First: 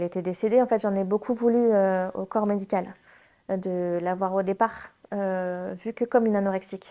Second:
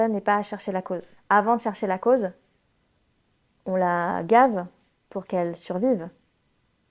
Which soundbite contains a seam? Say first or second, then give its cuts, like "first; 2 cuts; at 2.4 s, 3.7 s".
second; 1 cut; at 1.1 s